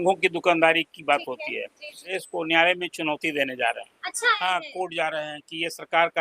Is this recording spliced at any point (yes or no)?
yes